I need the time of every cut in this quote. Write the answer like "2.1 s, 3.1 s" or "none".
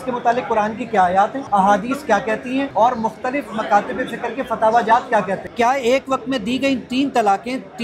1.4 s, 2.7 s, 5.4 s